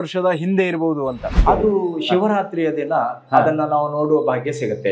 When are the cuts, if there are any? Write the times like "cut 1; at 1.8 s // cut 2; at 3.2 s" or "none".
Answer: cut 1; at 1.3 s